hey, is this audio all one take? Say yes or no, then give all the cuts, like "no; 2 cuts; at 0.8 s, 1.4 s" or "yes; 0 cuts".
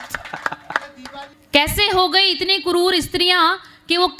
no; 1 cut; at 1.4 s